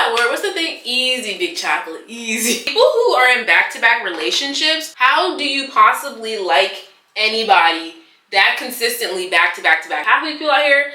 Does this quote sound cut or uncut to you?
cut